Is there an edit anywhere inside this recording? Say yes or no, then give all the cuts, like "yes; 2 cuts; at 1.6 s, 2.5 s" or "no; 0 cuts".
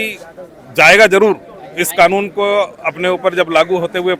no; 0 cuts